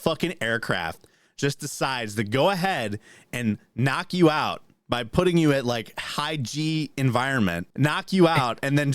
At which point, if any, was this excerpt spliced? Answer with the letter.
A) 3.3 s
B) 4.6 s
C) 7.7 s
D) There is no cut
C